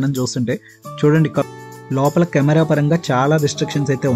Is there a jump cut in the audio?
yes; 1 cut; at 1.4 s

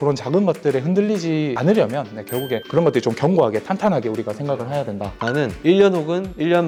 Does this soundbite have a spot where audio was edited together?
no; 0 cuts

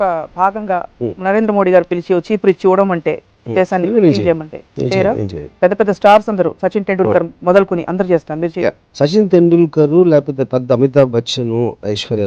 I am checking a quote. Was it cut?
yes; 1 cut; at 5.4 s

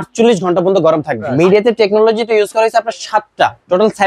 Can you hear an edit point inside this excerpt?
yes; 1 cut; at 1.3 s

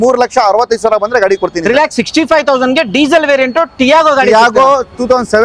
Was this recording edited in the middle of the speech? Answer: no; 0 cuts

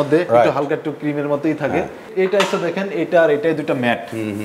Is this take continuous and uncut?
no; 1 cut; at 2.1 s

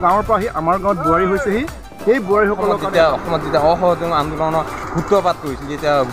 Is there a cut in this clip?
yes; 1 cut; at 2.8 s

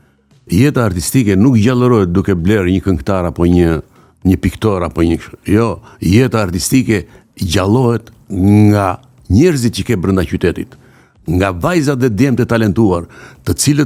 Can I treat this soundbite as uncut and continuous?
yes; 0 cuts

